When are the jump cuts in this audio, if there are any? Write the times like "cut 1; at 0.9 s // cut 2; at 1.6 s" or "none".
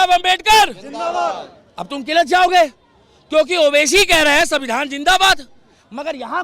none